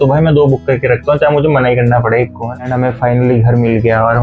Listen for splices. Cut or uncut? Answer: cut